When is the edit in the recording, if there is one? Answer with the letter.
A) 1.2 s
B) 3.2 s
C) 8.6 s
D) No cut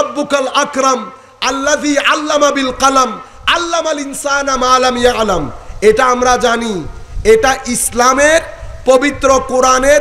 D